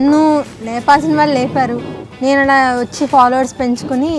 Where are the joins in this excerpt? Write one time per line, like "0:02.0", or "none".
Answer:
0:02.0

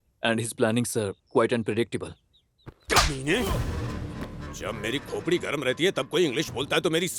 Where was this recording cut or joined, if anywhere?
none

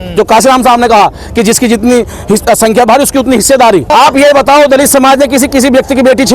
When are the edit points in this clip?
0:03.9

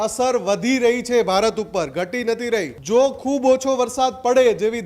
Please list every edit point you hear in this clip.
0:02.7

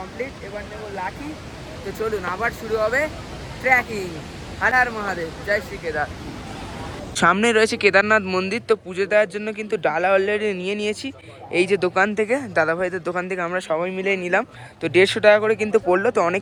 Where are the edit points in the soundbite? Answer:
none

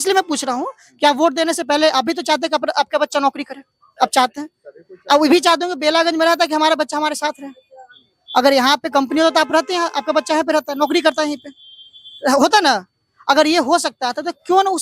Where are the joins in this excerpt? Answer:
none

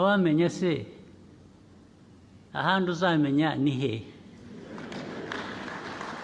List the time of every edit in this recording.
none

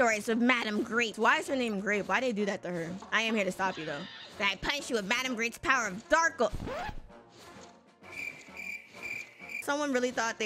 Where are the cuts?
0:01.2
0:03.0
0:09.6

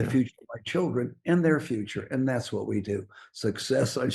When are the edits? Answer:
none

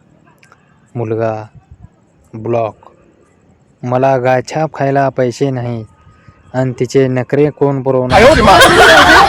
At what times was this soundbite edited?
none

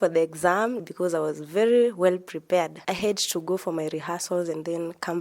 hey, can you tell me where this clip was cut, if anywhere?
0:00.8
0:02.8

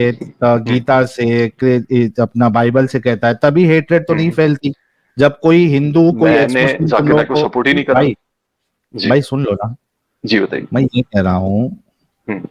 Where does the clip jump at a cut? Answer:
none

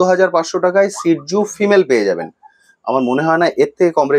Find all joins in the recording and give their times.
none

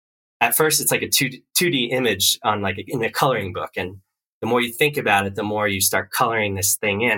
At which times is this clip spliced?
none

